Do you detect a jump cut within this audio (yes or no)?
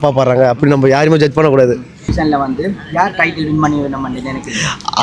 yes